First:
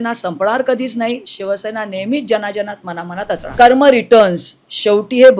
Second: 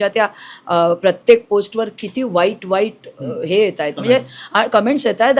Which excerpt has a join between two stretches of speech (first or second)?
first